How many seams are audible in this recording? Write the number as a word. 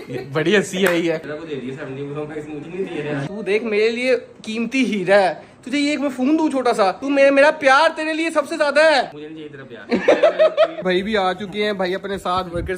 three